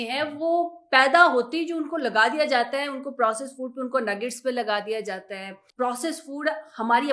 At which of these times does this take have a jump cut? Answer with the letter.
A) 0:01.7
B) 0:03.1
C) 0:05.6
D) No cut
C